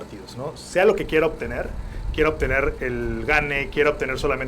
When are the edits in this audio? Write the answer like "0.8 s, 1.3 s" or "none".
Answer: none